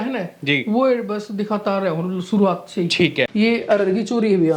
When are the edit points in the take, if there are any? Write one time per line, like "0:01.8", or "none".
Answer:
0:03.3